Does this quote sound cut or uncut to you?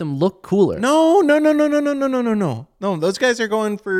uncut